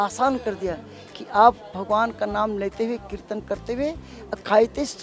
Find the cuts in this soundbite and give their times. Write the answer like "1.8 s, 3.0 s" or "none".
none